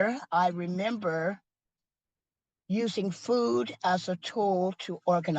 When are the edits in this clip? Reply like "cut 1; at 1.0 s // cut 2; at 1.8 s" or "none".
none